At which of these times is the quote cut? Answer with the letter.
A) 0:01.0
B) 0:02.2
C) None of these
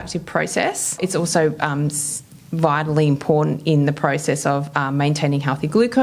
A